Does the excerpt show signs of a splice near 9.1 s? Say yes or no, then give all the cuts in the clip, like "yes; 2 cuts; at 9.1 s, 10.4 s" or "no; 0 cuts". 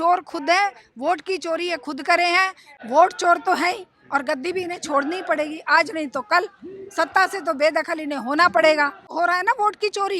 yes; 2 cuts; at 2.7 s, 9.1 s